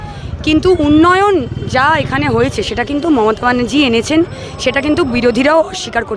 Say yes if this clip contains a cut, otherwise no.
no